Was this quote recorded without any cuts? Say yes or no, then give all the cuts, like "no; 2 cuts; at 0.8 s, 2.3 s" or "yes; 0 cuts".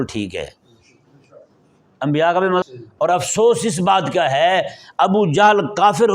no; 1 cut; at 2.6 s